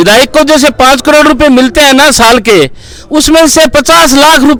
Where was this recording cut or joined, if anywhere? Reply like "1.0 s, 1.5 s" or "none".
none